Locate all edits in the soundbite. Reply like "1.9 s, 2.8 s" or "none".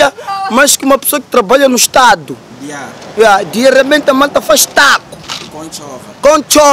none